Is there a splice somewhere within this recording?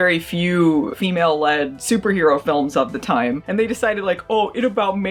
no; 0 cuts

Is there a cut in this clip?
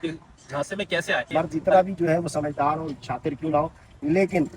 yes; 1 cut; at 1.3 s

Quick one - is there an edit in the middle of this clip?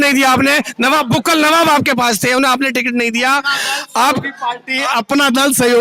no; 0 cuts

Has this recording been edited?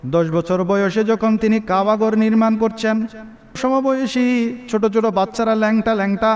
no; 0 cuts

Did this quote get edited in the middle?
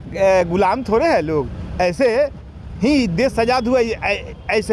no; 0 cuts

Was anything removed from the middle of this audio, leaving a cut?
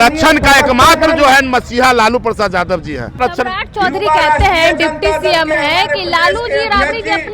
yes; 1 cut; at 3.1 s

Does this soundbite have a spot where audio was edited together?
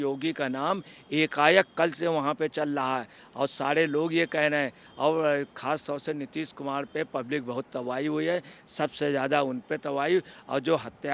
no; 0 cuts

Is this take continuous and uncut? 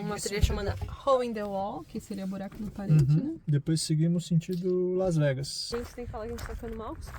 no; 1 cut; at 5.7 s

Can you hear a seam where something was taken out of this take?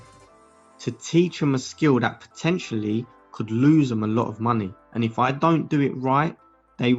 no; 0 cuts

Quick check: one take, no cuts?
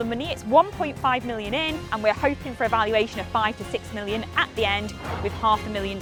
yes; 0 cuts

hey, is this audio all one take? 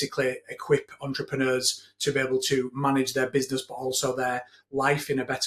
yes; 0 cuts

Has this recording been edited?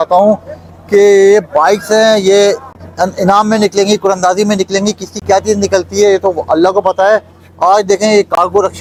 no; 0 cuts

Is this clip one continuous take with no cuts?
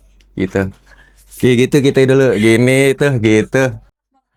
yes; 0 cuts

